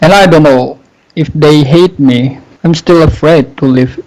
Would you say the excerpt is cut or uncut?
cut